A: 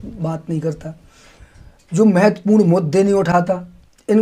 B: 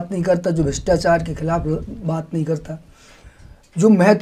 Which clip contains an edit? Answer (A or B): A